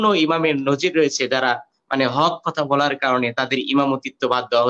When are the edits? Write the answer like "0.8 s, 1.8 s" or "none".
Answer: none